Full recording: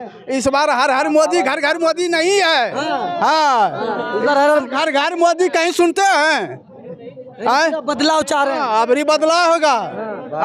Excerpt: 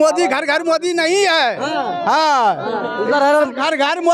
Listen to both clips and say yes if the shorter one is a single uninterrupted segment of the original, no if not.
yes